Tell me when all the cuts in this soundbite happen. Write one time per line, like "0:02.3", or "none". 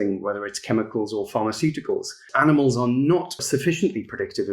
0:02.3
0:03.4